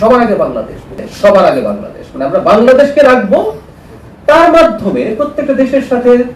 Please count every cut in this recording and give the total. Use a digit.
1